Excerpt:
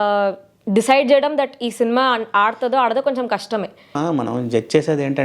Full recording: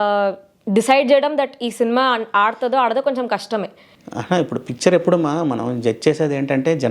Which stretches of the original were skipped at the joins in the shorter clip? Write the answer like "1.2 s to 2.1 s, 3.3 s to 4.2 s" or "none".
4.0 s to 5.3 s